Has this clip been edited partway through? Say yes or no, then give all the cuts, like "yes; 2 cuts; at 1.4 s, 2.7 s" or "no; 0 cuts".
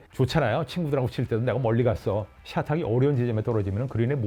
yes; 1 cut; at 2.4 s